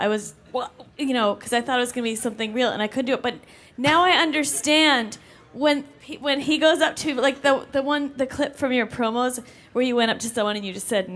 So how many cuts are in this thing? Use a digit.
1